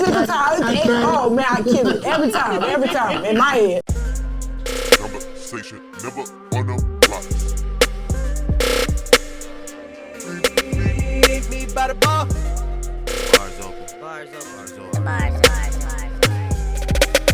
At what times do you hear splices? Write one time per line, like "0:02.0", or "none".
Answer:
0:03.9